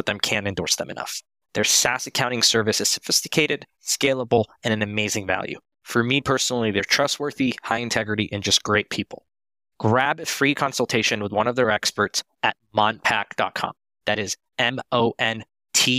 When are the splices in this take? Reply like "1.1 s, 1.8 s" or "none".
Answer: none